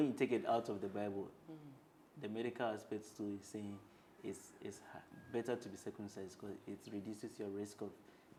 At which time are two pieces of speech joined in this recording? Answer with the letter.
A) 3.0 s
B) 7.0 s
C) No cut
C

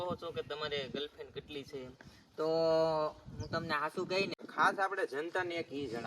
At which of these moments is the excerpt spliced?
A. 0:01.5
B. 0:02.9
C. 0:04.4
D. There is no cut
C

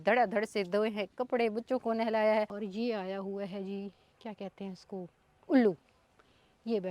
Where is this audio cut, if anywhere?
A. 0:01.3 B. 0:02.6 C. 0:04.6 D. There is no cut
B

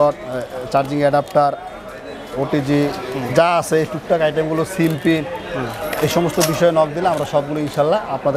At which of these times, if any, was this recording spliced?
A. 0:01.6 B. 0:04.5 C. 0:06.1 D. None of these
D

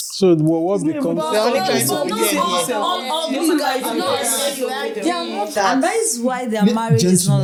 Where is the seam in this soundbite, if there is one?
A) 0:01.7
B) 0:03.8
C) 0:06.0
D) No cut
D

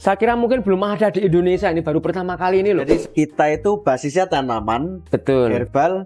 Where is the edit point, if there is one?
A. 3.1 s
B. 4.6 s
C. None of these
A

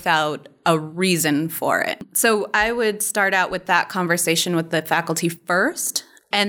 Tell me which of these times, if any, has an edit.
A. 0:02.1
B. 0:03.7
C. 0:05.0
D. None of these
A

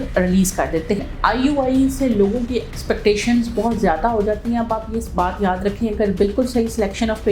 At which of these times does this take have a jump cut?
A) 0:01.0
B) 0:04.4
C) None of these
A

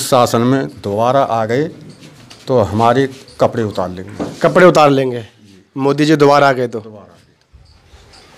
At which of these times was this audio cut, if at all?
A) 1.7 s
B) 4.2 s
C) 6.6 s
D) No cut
D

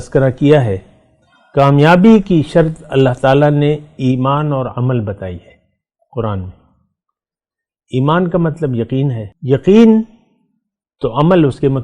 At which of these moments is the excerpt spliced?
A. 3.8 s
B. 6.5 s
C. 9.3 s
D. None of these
C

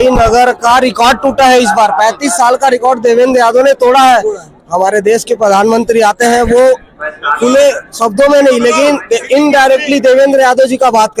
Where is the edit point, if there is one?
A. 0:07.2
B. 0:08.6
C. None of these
C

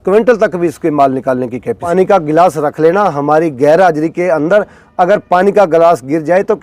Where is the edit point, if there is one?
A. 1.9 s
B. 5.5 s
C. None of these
A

